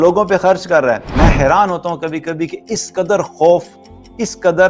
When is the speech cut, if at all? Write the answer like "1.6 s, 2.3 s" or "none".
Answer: 1.1 s